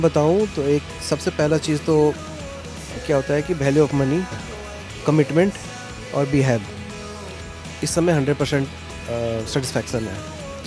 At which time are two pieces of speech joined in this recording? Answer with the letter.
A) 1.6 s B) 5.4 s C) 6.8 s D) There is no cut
D